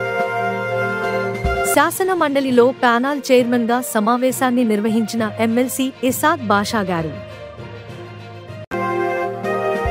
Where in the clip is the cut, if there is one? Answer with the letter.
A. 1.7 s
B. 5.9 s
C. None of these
A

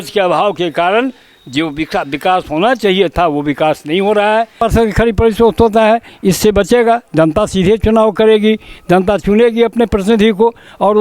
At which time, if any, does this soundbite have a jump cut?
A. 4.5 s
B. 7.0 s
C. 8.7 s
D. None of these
A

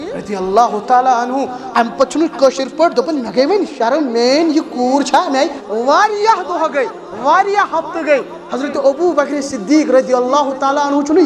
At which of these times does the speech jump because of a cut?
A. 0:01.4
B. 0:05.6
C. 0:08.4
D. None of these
B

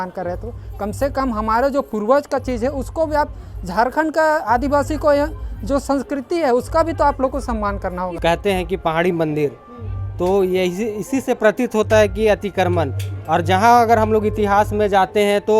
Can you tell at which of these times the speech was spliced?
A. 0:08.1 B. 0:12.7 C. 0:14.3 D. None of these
A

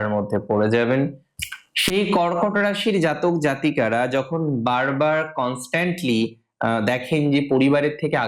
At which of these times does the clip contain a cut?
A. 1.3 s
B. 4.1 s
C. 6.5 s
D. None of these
A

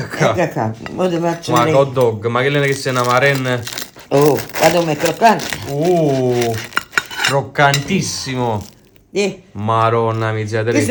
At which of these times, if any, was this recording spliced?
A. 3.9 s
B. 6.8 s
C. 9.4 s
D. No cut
D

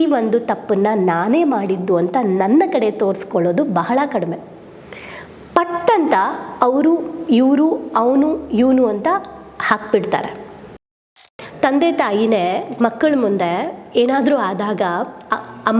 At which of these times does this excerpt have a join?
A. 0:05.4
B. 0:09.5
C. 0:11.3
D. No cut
C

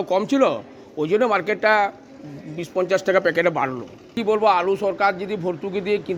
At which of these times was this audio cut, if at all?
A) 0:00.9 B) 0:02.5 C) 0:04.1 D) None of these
C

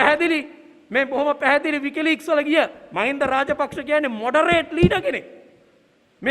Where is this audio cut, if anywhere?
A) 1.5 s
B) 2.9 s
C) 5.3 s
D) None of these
B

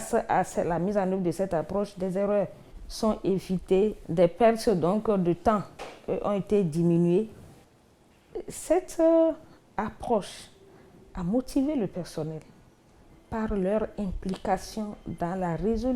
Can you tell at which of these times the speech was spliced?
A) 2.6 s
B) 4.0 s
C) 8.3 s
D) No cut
D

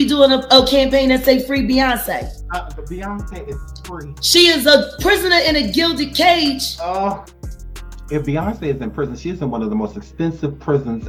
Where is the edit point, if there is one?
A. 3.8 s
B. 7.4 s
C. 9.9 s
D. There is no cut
D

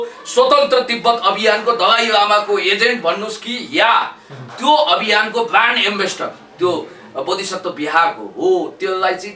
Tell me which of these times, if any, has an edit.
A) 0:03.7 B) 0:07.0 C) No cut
C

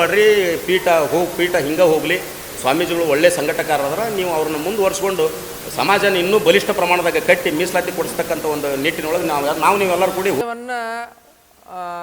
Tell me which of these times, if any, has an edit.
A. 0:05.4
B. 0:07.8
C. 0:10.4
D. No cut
C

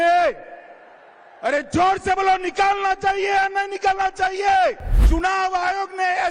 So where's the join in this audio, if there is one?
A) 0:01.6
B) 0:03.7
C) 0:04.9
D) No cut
C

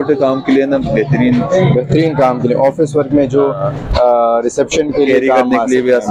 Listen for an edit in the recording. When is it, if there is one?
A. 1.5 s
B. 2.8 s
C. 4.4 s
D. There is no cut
D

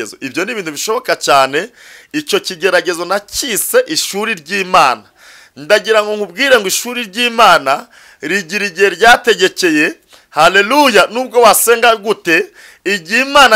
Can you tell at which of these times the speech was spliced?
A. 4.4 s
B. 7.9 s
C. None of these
C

